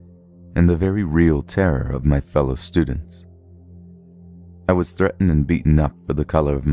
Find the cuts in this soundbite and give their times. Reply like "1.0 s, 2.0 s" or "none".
4.6 s